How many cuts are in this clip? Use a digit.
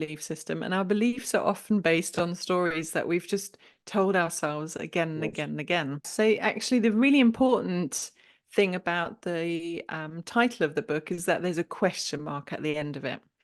1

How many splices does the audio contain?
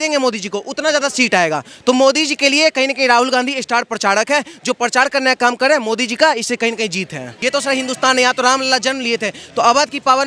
1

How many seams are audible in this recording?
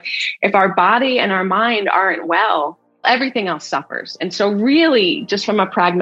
1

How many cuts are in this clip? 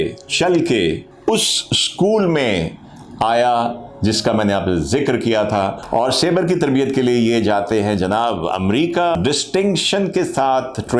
3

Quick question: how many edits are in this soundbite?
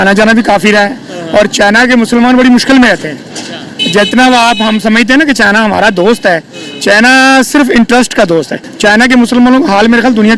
1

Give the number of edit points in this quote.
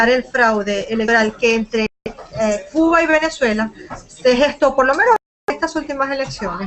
1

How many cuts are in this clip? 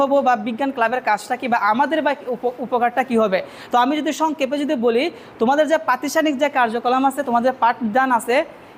0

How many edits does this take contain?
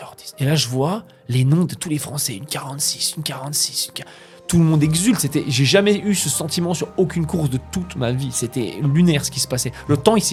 0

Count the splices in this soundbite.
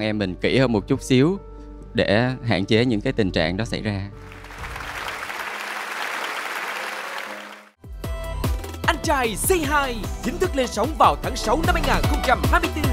1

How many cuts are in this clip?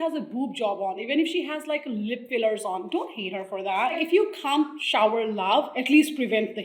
4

